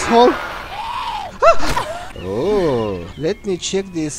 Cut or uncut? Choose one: cut